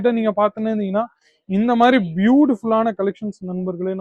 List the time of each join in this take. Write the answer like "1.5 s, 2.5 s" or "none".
none